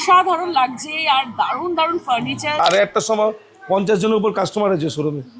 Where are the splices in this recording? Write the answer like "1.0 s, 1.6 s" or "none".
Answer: 2.6 s